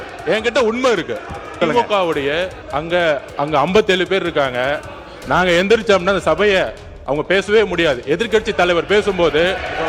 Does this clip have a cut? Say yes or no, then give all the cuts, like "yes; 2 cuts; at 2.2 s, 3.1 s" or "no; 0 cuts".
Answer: yes; 3 cuts; at 1.5 s, 2.6 s, 3.3 s